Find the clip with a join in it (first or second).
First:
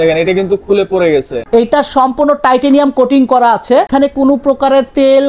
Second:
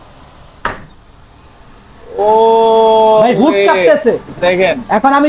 first